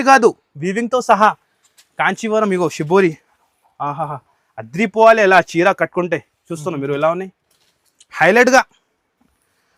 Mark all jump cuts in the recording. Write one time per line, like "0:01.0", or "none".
none